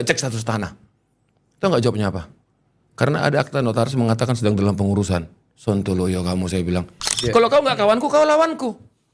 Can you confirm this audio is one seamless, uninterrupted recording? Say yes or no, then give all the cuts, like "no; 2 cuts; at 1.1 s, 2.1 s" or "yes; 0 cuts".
no; 1 cut; at 7.1 s